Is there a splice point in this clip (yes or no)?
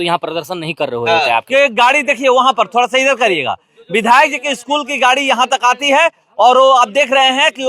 yes